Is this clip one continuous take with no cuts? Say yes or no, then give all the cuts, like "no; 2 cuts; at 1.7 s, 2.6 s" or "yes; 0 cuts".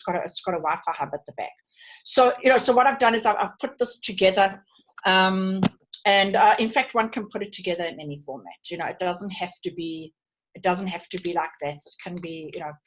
yes; 0 cuts